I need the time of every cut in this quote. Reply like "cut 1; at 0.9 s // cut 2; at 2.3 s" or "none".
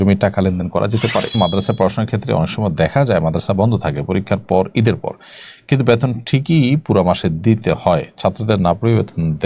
cut 1; at 1.3 s